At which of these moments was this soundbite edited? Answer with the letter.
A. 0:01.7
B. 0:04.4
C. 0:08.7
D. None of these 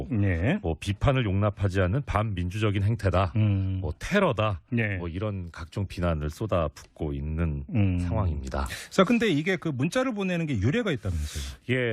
B